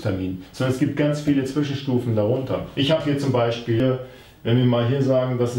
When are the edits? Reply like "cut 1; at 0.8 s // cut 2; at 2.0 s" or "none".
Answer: cut 1; at 3.8 s